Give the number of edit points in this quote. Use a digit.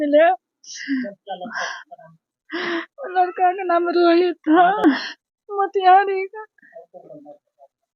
0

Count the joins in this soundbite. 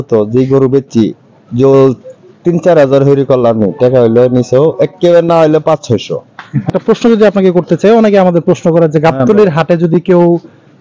1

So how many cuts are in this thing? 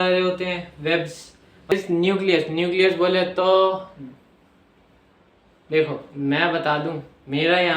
1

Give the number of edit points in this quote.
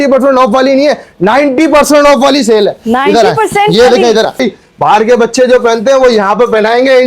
1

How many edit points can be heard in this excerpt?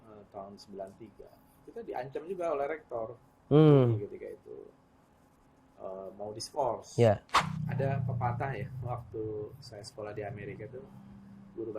1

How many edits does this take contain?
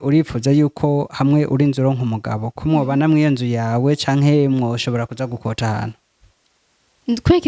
0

